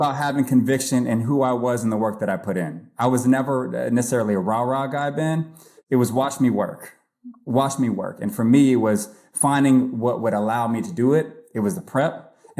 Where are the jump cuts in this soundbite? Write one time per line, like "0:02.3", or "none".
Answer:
0:05.8